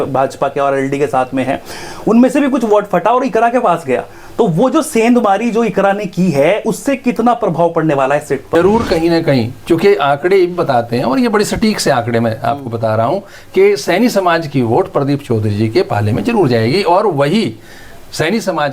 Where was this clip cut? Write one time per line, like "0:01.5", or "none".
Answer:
0:08.5